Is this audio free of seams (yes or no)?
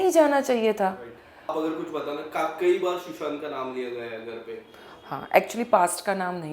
no